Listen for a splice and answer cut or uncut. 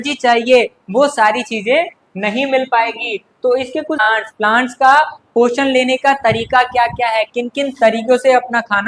cut